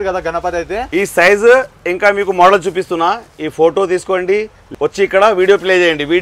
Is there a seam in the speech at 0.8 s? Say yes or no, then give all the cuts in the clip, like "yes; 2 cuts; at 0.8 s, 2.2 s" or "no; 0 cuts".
yes; 2 cuts; at 0.8 s, 4.6 s